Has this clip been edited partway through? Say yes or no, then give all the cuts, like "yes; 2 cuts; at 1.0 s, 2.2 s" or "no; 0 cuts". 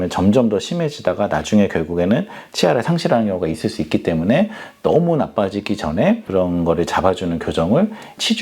yes; 1 cut; at 6.2 s